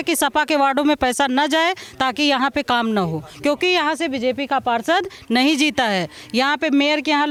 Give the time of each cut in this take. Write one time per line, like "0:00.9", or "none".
none